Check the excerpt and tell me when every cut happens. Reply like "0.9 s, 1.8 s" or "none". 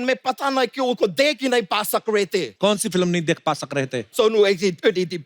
2.5 s, 4.1 s